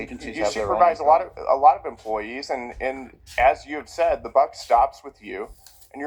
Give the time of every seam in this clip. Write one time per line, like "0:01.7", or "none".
none